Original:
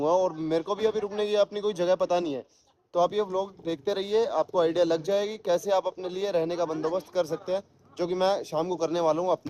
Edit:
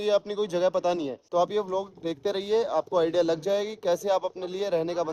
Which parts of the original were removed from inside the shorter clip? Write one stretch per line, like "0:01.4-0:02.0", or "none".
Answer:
0:02.4-0:02.8